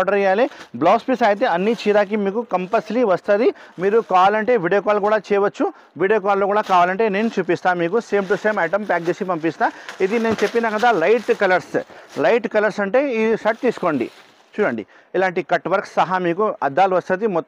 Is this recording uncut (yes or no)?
yes